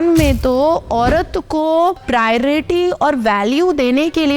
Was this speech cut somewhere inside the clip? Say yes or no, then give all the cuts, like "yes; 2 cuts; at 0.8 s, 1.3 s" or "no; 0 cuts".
yes; 1 cut; at 2.0 s